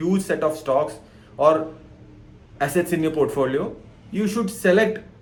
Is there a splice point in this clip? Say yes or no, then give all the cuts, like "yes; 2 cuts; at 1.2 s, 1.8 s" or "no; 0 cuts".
no; 0 cuts